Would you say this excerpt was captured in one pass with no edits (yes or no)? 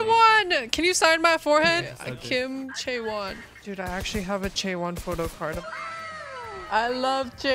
no